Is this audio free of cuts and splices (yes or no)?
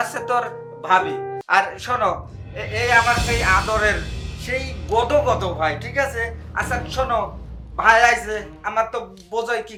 yes